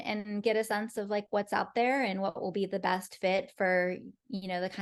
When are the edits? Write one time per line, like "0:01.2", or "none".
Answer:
none